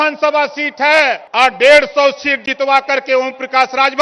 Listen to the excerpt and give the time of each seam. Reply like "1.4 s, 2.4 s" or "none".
1.2 s